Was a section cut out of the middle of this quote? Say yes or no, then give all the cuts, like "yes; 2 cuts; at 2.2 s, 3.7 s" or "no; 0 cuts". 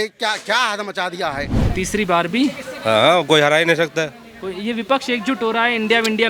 yes; 1 cut; at 1.6 s